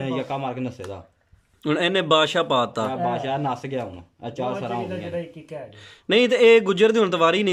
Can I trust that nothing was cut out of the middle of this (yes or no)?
yes